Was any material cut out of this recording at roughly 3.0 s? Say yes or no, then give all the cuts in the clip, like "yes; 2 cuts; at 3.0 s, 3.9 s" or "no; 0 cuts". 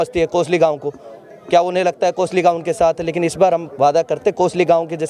no; 0 cuts